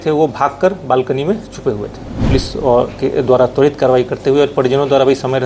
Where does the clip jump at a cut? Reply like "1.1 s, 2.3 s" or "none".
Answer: 2.2 s

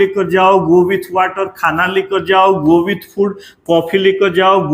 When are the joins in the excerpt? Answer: none

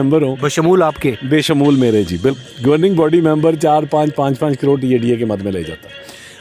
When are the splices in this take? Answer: 2.4 s

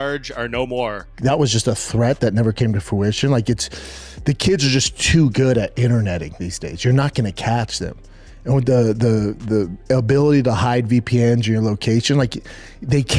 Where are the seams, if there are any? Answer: 1.1 s

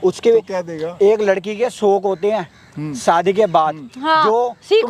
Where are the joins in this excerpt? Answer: none

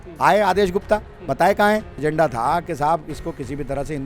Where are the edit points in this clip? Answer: 1.9 s

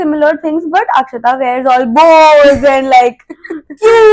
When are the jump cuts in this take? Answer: none

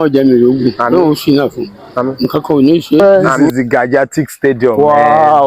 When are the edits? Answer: 3.0 s

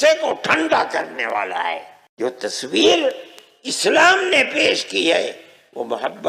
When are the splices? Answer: 2.0 s

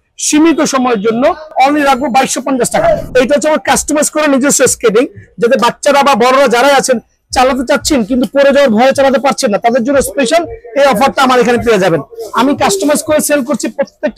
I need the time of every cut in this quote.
1.5 s, 3.0 s

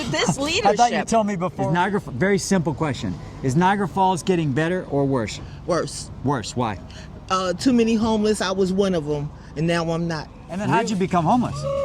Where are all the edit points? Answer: 1.5 s, 10.6 s

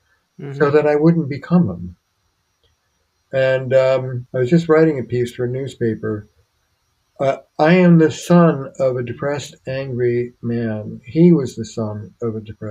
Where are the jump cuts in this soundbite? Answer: 4.2 s

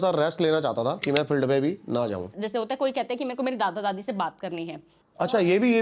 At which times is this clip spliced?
1.0 s, 2.3 s

